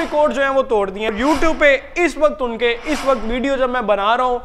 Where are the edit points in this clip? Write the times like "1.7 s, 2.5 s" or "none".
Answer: 1.2 s